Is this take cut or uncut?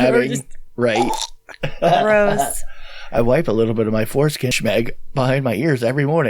cut